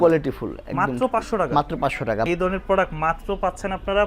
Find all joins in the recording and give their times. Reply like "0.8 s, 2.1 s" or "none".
2.3 s